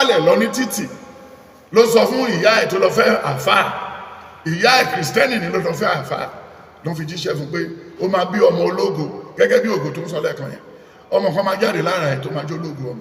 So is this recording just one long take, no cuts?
yes; 0 cuts

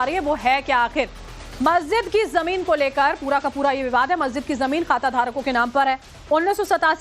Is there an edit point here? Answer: yes; 1 cut; at 3.8 s

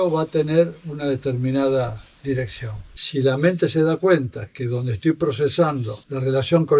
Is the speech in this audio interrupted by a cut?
yes; 1 cut; at 2.9 s

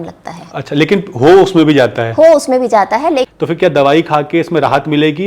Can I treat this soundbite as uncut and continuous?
no; 1 cut; at 3.3 s

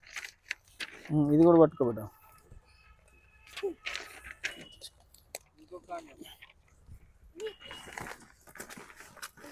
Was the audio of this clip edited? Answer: no; 0 cuts

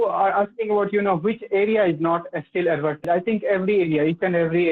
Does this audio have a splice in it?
yes; 1 cut; at 3.0 s

